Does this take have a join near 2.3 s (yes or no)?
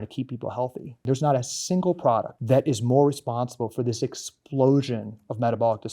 yes